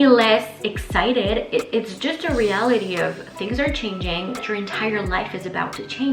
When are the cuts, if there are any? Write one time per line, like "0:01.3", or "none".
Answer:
0:04.4